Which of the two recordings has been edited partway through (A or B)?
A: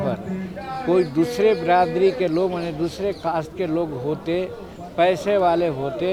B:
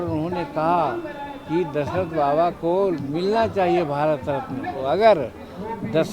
B